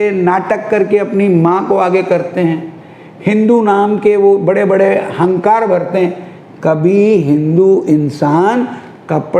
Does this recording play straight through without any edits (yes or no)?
yes